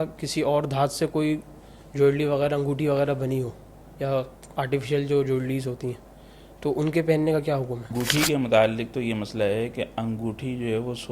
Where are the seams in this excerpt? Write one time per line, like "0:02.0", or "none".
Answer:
0:07.9